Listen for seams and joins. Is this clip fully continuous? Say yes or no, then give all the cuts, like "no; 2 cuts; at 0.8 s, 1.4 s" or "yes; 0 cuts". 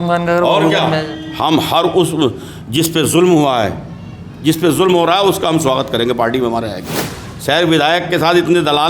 no; 1 cut; at 7.3 s